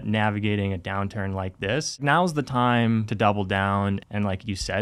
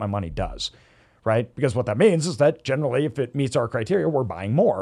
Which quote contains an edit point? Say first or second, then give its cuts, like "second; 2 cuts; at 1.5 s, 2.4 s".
first; 3 cuts; at 2.0 s, 3.1 s, 4.0 s